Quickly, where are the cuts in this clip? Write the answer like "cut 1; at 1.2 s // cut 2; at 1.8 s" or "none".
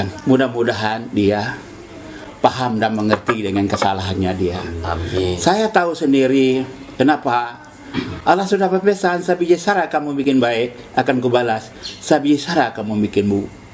none